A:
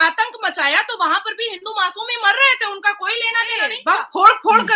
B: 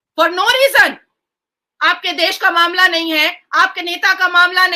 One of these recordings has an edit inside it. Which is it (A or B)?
A